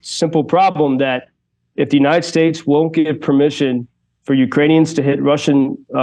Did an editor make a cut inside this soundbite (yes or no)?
yes